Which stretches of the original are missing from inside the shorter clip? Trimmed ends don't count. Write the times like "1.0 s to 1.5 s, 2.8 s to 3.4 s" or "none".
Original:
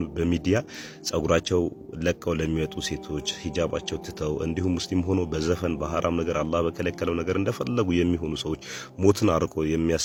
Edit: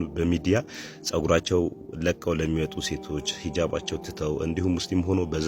none

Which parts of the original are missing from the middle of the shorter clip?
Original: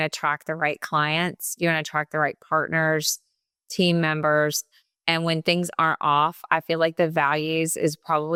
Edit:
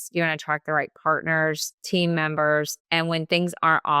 3.2 s to 3.6 s, 4.6 s to 4.9 s

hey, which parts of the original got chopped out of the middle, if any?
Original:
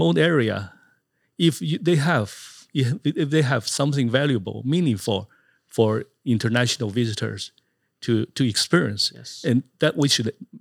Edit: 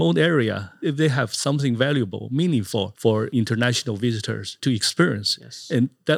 0.8 s to 3.1 s, 5.5 s to 6.1 s, 7.5 s to 8.3 s

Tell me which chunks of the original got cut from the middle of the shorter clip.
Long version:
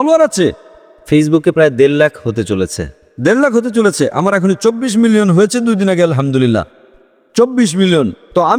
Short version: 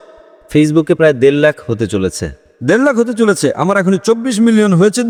none

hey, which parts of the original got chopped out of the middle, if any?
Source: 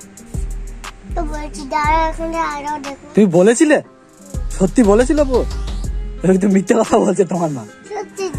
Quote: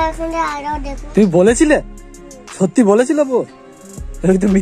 none

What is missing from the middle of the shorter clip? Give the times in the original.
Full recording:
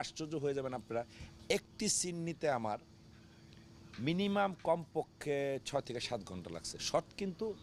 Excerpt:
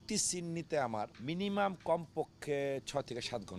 2.9 s to 3.9 s

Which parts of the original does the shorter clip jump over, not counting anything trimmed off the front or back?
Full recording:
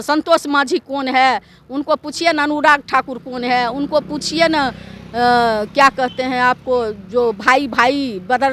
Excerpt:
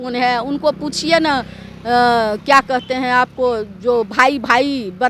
none

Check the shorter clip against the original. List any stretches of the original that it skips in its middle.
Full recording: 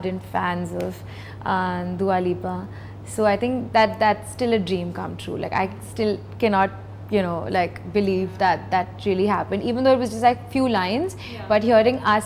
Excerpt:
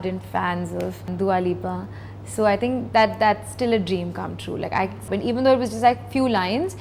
1.1 s to 1.9 s, 5.9 s to 9.5 s

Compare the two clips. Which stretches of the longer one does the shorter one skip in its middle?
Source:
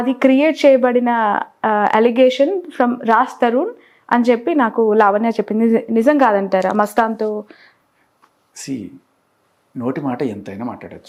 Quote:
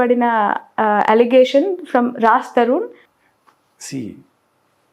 3.9 s to 7.8 s

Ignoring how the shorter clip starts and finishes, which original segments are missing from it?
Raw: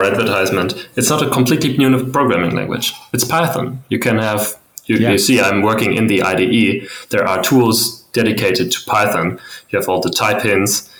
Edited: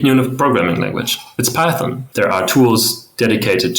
3.7 s to 7.0 s

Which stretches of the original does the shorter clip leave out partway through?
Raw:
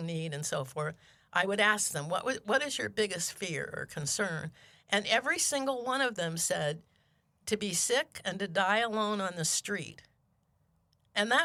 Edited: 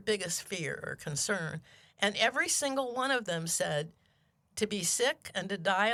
none

